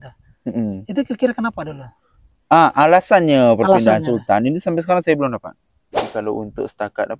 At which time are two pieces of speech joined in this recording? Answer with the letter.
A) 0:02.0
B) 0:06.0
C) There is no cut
B